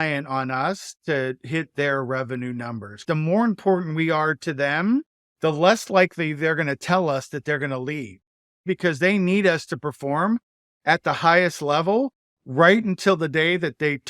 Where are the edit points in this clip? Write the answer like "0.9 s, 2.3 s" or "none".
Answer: 3.0 s, 5.2 s, 8.6 s